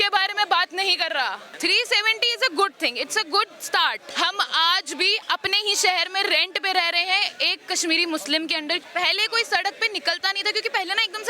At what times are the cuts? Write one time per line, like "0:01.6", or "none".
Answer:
0:01.5
0:04.1
0:08.8